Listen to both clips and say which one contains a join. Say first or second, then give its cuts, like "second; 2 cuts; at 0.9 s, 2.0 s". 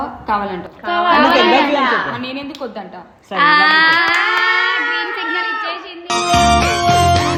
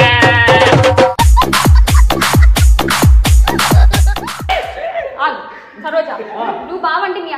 second; 1 cut; at 4.5 s